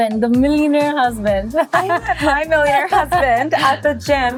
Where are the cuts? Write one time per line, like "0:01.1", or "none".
none